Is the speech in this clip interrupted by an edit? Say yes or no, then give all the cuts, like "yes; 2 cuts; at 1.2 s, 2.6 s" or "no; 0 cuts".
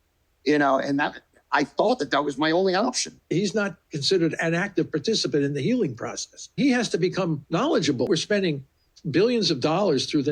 yes; 3 cuts; at 3.3 s, 6.6 s, 8.1 s